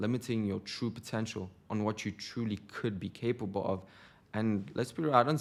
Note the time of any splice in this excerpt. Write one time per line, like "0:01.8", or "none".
none